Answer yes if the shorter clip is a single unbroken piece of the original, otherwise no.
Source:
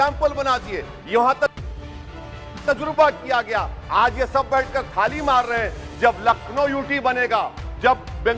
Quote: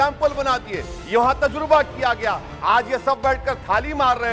no